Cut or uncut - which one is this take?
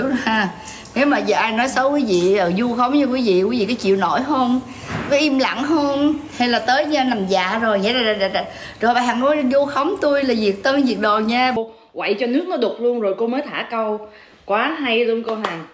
cut